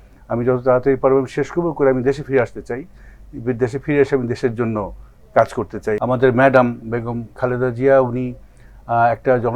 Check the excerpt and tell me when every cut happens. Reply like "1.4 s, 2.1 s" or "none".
6.0 s